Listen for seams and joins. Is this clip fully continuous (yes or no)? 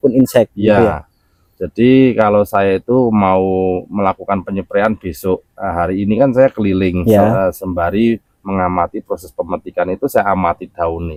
yes